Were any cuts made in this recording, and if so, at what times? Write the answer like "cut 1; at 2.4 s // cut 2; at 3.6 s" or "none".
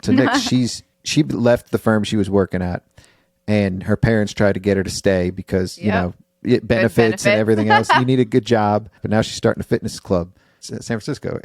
cut 1; at 1.0 s // cut 2; at 8.9 s // cut 3; at 10.5 s